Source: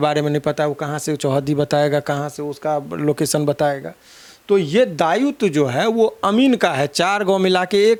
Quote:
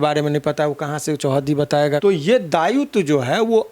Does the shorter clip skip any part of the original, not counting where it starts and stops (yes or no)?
yes